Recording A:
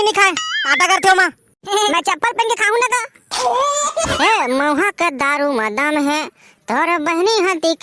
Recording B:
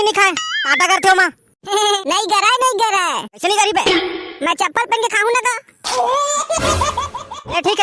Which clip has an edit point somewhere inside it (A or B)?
A